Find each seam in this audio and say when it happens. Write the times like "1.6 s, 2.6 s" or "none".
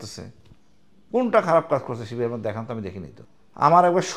none